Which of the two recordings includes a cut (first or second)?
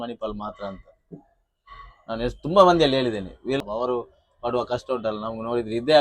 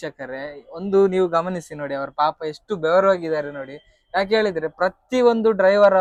first